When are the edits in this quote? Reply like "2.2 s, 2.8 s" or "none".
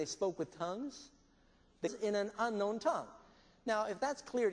none

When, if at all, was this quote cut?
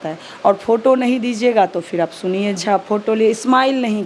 2.6 s

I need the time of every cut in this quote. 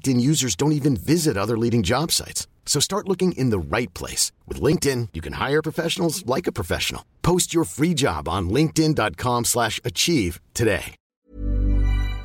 11.1 s

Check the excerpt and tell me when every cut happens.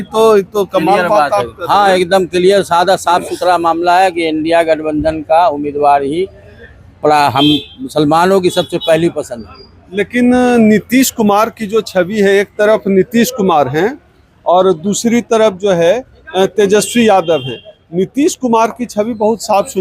none

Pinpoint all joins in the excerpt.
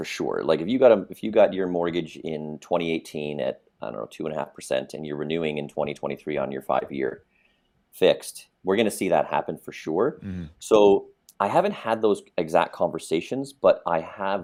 none

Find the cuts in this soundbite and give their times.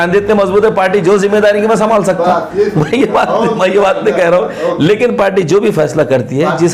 none

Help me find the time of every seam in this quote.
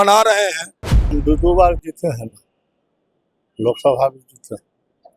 1.2 s

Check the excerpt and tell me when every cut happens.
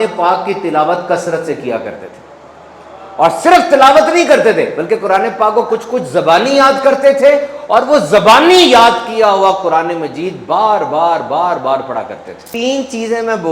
12.4 s

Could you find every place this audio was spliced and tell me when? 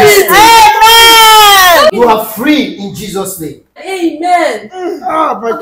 1.9 s, 3.8 s

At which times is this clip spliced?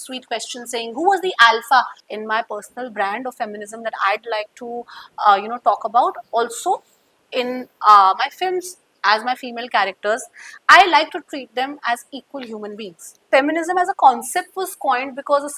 2.0 s, 13.3 s

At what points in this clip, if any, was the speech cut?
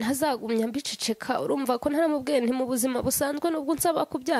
none

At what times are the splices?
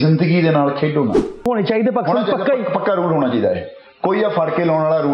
1.5 s

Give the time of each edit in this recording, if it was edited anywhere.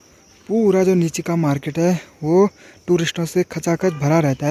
none

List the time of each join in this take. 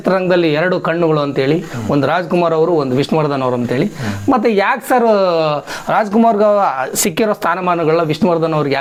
none

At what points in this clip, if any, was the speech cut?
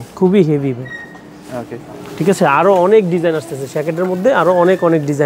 none

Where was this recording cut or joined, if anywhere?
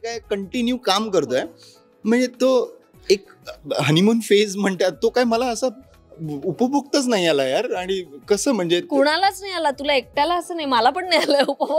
none

